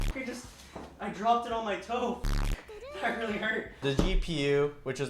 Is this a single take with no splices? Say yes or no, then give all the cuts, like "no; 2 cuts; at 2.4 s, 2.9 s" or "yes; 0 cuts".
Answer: no; 1 cut; at 3.8 s